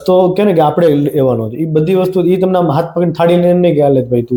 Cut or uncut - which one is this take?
uncut